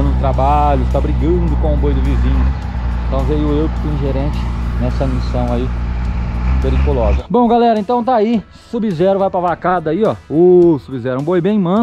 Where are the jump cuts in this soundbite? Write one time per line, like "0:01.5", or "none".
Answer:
0:07.2